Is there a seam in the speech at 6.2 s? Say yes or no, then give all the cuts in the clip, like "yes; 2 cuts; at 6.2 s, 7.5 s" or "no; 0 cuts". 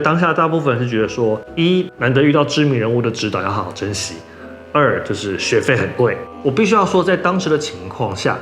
yes; 1 cut; at 6.2 s